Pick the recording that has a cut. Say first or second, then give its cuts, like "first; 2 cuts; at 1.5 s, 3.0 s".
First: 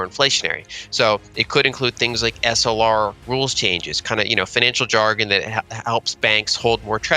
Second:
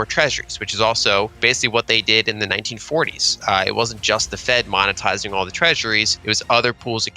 second; 2 cuts; at 1.3 s, 6.1 s